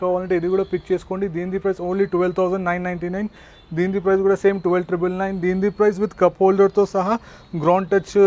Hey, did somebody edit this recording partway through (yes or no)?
no